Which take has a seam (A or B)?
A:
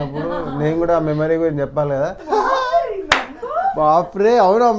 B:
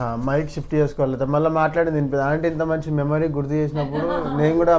A